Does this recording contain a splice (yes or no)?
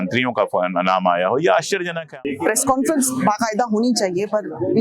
yes